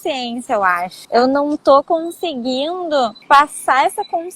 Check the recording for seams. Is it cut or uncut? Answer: cut